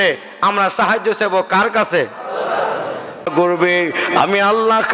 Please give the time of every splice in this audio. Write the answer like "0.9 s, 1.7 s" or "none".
3.3 s

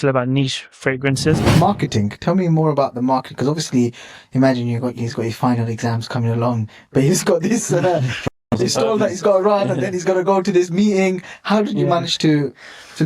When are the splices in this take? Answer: 1.4 s

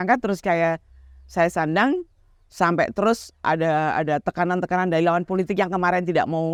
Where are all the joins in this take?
none

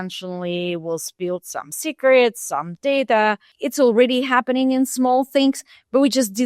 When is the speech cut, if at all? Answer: 3.5 s

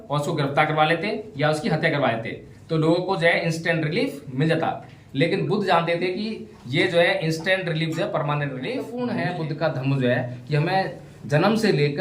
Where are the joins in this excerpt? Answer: 8.9 s

